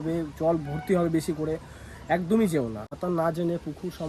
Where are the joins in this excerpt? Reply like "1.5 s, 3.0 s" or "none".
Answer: 2.9 s